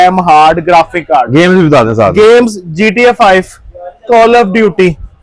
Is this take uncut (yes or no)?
yes